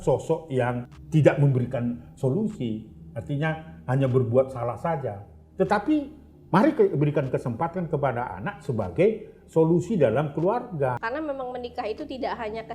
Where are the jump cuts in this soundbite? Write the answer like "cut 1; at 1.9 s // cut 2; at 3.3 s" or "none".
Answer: cut 1; at 0.9 s // cut 2; at 11.0 s